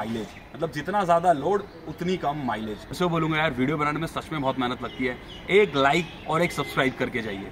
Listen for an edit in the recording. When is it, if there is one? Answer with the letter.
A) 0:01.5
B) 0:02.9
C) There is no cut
B